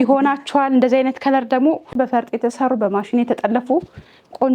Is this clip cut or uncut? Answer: cut